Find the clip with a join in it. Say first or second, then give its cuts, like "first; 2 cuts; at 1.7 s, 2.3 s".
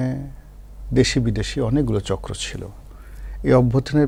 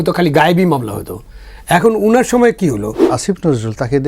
second; 1 cut; at 3.1 s